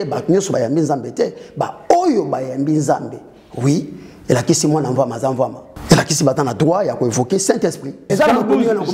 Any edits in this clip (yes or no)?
yes